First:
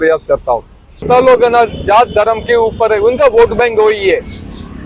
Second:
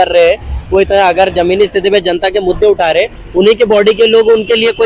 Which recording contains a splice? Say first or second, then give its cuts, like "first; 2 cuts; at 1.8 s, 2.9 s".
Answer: first; 1 cut; at 1.0 s